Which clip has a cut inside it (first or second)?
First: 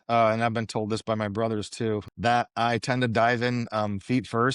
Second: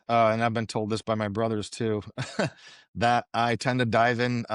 first